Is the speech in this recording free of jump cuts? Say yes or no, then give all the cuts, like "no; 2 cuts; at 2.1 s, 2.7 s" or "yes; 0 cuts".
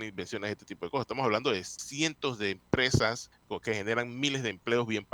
no; 2 cuts; at 1.8 s, 3.3 s